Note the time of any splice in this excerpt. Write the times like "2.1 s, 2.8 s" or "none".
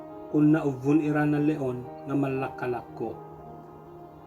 3.2 s